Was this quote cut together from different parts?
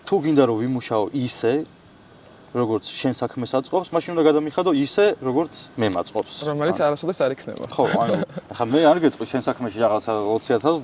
no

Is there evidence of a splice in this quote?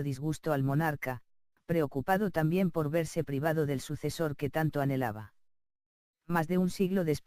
yes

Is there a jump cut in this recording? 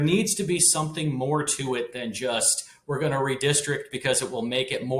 no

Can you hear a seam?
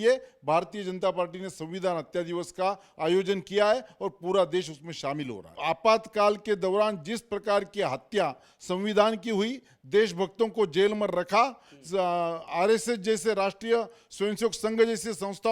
yes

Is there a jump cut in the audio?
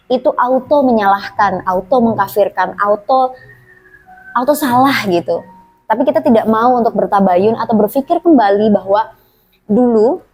no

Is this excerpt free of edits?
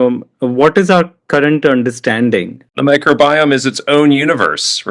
no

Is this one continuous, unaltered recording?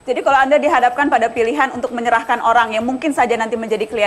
yes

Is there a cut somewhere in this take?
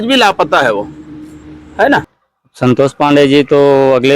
yes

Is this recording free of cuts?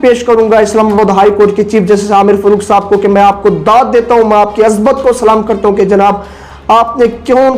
yes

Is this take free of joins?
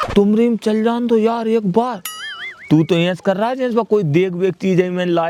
yes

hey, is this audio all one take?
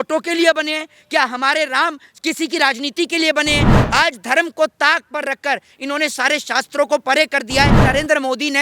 no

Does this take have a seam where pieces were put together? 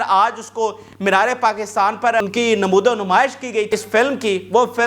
yes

